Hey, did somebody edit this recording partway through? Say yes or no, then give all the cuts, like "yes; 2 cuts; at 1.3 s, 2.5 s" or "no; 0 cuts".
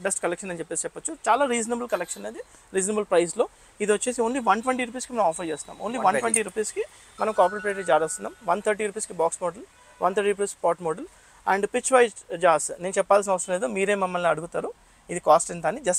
no; 0 cuts